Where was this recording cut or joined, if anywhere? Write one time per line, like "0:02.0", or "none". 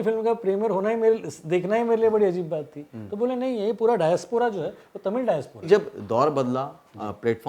0:05.7